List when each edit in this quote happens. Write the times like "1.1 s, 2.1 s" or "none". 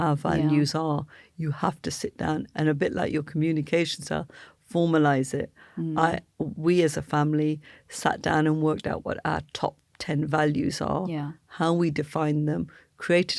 none